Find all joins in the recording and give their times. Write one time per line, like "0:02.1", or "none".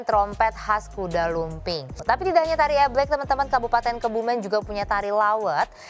0:01.9